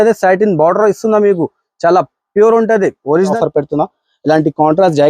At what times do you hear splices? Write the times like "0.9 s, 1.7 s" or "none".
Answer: 3.4 s